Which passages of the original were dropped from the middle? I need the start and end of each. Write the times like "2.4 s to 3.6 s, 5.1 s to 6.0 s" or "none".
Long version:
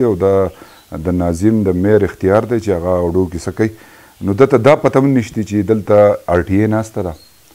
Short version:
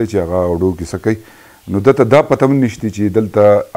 none